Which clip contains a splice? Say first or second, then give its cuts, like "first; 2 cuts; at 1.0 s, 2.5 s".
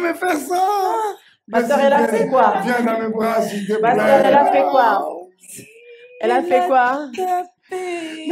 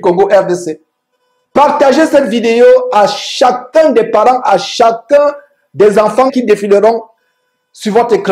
second; 1 cut; at 6.3 s